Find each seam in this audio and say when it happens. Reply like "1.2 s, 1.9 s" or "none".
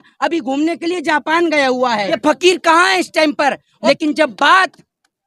2.2 s, 3.7 s